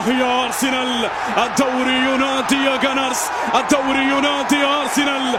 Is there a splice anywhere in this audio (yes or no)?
no